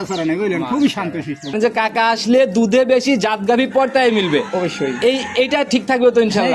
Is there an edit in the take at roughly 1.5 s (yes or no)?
yes